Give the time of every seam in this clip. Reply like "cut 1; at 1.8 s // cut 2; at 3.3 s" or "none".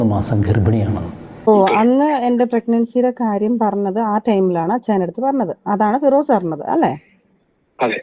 cut 1; at 1.2 s